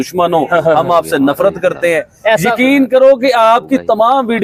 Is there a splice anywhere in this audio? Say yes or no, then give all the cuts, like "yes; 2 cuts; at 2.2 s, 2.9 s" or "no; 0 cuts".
no; 0 cuts